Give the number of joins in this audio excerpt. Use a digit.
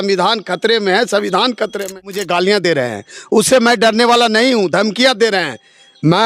1